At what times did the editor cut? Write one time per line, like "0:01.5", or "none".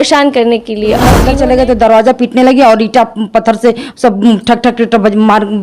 0:01.3